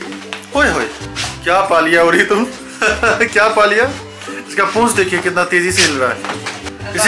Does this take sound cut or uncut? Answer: uncut